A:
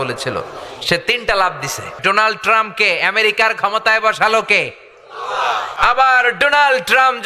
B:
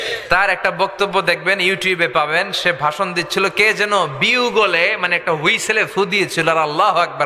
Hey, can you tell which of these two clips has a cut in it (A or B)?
A